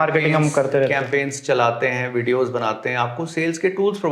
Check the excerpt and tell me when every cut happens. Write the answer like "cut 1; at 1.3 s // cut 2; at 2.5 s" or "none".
none